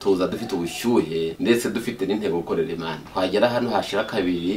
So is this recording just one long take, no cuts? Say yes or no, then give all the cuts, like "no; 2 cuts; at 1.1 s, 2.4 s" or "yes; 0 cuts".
no; 2 cuts; at 1.3 s, 3.0 s